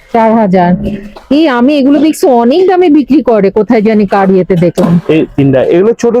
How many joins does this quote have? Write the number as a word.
zero